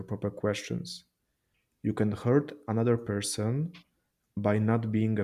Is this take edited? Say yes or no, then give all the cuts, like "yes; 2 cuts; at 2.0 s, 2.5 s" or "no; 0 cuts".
no; 0 cuts